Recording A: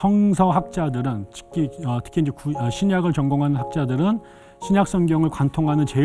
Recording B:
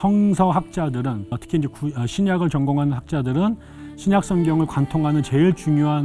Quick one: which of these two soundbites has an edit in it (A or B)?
B